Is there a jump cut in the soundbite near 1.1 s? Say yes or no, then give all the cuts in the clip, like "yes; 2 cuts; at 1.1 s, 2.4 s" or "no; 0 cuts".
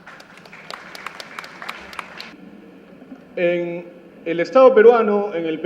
no; 1 cut; at 4.4 s